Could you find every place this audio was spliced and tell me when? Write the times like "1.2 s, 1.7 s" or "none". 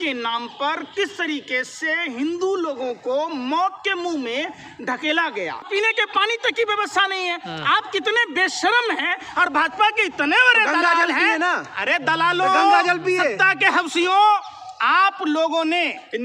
5.7 s